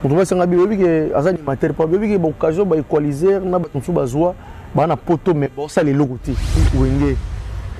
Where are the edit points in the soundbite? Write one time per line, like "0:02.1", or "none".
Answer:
0:06.6